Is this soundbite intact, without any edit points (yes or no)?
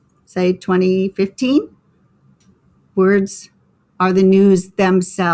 yes